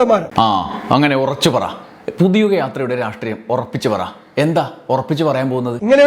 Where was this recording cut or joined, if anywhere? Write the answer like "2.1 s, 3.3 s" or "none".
none